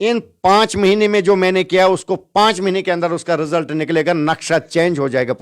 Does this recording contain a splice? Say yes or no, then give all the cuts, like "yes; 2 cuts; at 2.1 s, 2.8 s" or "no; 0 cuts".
no; 0 cuts